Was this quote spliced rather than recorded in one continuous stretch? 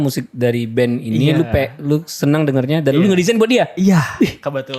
no; 0 cuts

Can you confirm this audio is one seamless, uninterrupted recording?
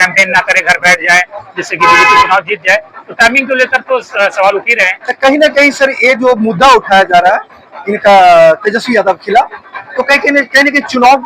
yes; 0 cuts

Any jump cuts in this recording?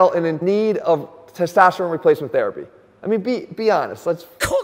no; 0 cuts

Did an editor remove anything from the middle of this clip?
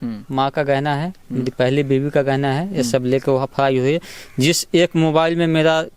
no; 0 cuts

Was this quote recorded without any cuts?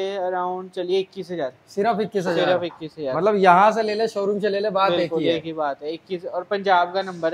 yes; 0 cuts

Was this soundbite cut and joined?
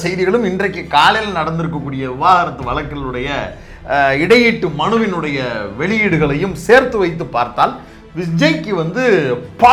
no; 0 cuts

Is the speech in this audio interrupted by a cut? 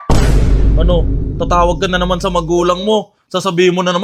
no; 0 cuts

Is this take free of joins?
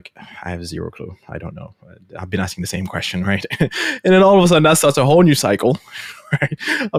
yes; 0 cuts

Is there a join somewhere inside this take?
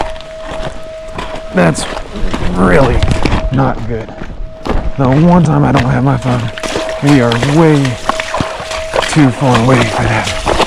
yes; 1 cut; at 6.6 s

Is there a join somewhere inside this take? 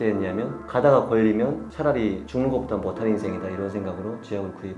no; 0 cuts

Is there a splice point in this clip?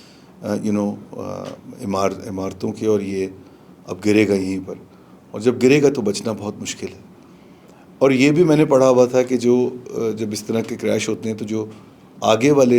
no; 0 cuts

